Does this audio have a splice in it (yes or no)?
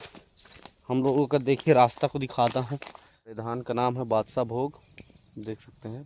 yes